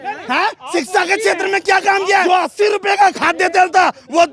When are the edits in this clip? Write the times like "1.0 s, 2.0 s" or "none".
2.2 s